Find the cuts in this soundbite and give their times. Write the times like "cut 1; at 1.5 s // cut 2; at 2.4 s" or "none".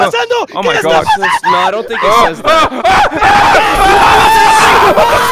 none